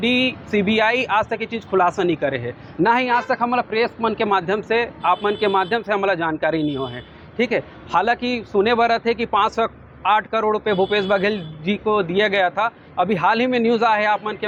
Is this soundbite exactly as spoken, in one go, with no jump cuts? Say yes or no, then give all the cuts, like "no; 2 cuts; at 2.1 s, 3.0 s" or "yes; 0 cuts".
yes; 0 cuts